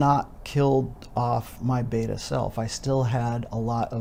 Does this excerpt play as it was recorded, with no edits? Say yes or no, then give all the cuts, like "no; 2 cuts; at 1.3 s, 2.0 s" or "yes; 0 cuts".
yes; 0 cuts